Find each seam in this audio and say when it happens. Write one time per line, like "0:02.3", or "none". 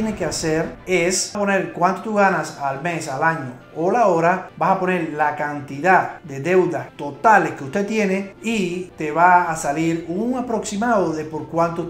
none